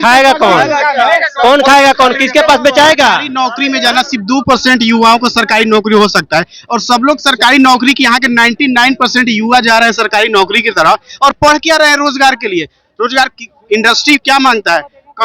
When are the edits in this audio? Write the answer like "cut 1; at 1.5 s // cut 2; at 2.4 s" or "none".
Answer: cut 1; at 3.3 s